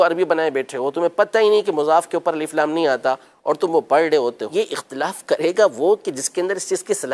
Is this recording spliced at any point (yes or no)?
yes